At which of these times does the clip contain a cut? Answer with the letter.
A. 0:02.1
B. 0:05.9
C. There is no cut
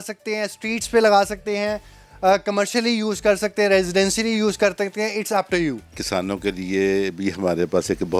B